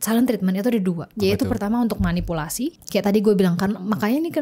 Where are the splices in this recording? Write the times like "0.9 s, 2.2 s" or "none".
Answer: 1.1 s, 2.8 s